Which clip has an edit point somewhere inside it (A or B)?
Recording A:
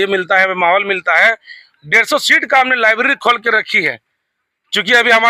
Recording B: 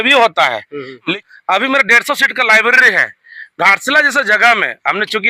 B